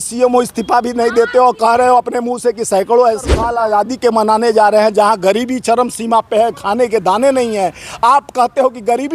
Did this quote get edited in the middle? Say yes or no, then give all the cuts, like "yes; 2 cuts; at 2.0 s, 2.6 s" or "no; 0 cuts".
yes; 1 cut; at 3.4 s